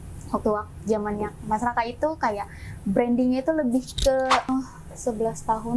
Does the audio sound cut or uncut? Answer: cut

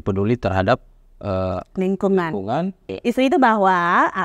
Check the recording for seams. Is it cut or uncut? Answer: cut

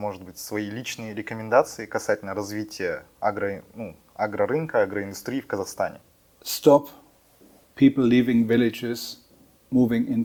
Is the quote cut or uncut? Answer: uncut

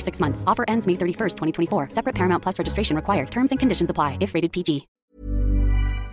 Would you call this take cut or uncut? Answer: cut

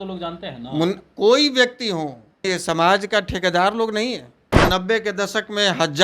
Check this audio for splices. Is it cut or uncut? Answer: cut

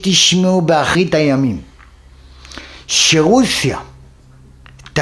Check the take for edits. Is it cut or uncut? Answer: cut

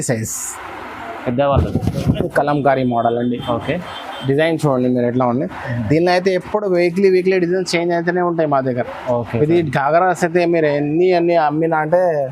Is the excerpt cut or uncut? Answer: uncut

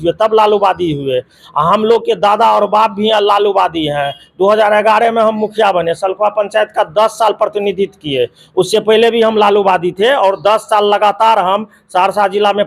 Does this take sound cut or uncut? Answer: uncut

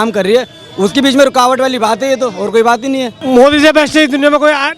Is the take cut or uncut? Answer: cut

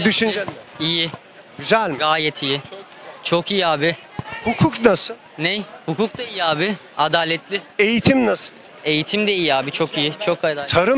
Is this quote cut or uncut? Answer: uncut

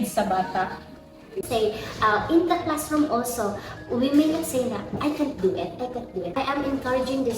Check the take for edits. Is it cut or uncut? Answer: cut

